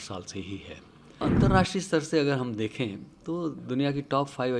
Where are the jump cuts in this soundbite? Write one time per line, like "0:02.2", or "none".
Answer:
0:01.2